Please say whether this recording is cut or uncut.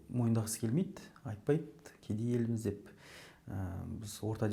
uncut